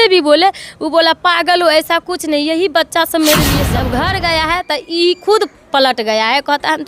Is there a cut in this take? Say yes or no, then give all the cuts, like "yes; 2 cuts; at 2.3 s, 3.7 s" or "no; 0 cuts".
yes; 1 cut; at 3.8 s